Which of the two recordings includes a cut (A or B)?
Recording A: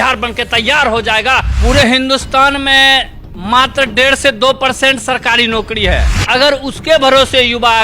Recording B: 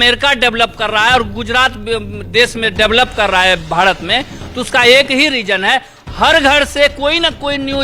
A